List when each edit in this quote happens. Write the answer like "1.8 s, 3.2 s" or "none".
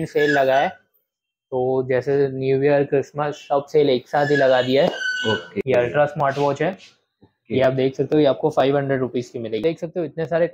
5.5 s, 9.6 s

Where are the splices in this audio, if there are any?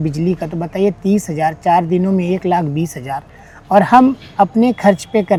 none

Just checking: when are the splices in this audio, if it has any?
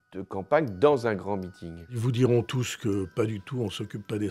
2.0 s

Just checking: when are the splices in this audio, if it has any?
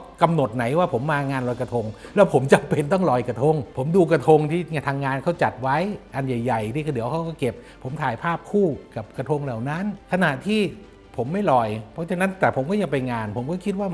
3.7 s

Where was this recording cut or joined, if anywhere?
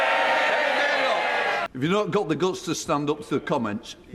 1.7 s

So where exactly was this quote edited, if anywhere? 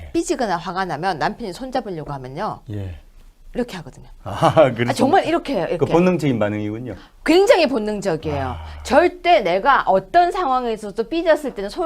1.1 s

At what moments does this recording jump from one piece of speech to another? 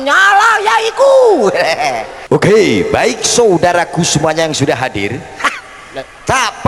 2.1 s

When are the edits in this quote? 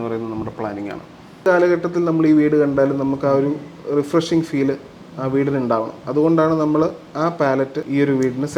1.5 s

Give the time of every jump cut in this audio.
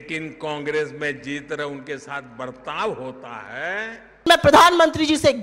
4.3 s

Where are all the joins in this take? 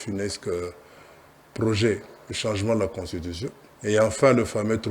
3.7 s

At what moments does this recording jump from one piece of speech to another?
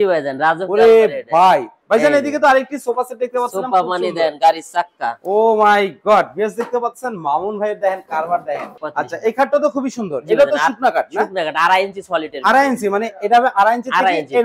1.7 s, 8.8 s

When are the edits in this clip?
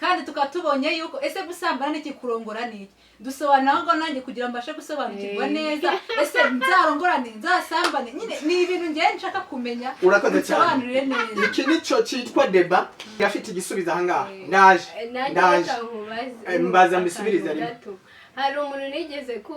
13.0 s

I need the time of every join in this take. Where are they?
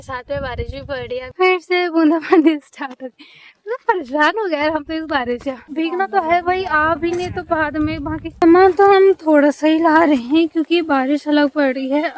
1.3 s, 5.6 s, 8.4 s

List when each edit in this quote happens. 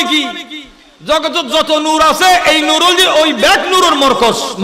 none

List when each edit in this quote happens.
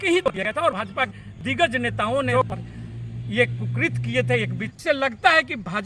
2.3 s, 4.7 s

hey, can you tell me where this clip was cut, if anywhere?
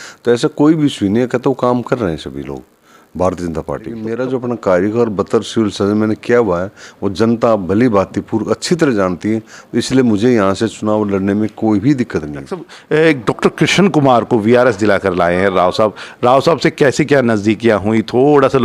4.1 s, 12.7 s

